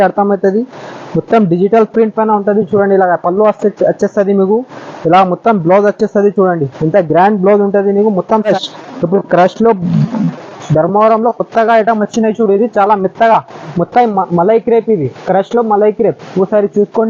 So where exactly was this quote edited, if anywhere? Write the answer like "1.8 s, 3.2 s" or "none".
8.5 s